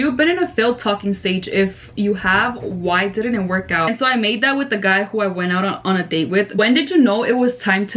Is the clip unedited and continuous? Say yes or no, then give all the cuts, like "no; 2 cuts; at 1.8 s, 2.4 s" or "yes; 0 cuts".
no; 2 cuts; at 3.9 s, 6.5 s